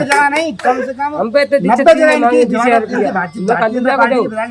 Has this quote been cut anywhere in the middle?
no; 0 cuts

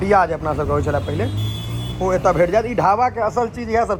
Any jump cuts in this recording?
no; 0 cuts

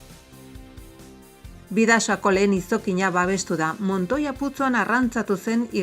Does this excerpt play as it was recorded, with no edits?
no; 1 cut; at 1.2 s

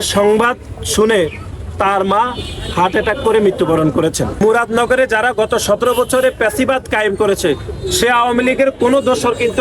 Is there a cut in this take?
yes; 1 cut; at 4.4 s

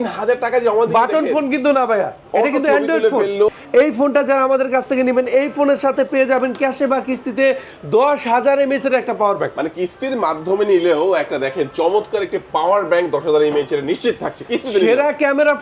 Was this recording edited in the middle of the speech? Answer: yes; 1 cut; at 3.5 s

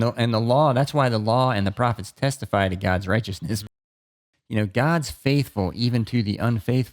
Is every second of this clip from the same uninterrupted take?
no; 1 cut; at 3.8 s

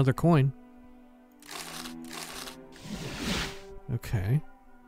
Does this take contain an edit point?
yes; 1 cut; at 3.8 s

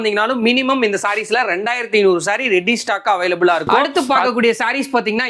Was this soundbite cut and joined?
yes; 1 cut; at 3.9 s

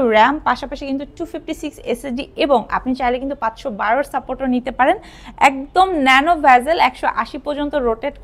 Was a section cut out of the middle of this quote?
no; 0 cuts

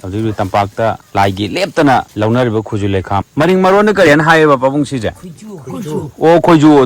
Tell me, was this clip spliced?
yes; 3 cuts; at 1.0 s, 2.1 s, 3.3 s

